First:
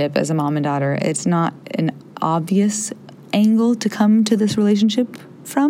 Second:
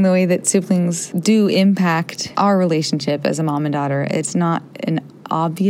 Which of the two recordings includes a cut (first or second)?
second